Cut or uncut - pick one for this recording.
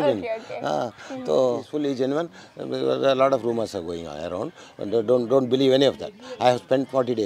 cut